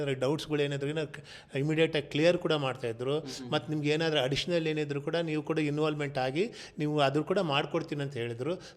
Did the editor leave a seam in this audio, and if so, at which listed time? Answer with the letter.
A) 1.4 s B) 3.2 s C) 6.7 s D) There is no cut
D